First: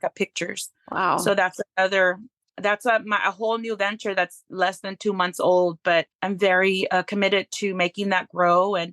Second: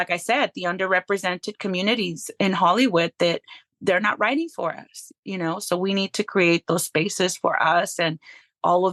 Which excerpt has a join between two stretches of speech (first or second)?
first